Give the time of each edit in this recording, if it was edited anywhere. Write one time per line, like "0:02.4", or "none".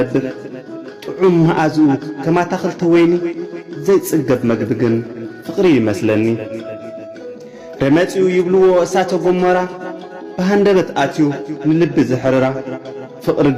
none